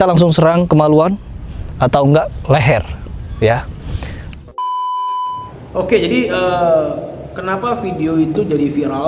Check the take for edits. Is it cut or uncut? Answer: uncut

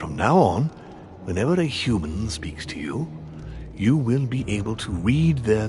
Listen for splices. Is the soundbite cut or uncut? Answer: cut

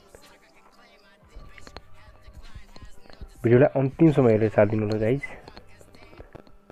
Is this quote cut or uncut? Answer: cut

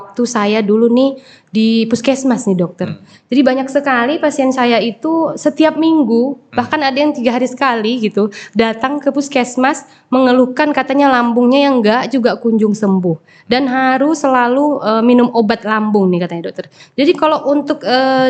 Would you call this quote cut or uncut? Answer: uncut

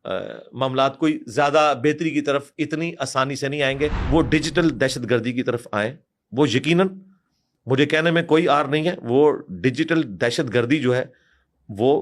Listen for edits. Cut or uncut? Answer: cut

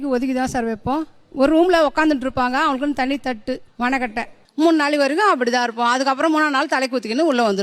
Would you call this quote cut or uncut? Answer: uncut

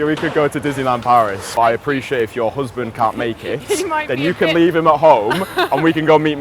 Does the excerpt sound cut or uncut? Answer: cut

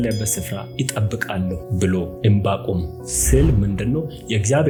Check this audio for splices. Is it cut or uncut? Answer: uncut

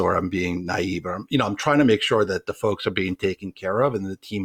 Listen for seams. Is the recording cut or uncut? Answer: uncut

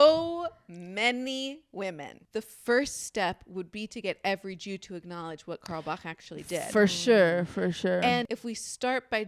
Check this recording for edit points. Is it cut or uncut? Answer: cut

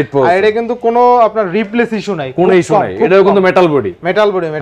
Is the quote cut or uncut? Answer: uncut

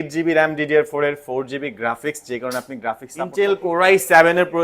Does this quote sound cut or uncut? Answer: cut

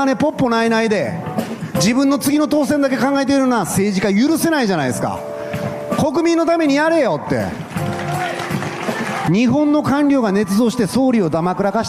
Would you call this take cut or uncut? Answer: cut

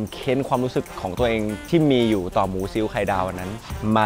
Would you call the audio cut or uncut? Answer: uncut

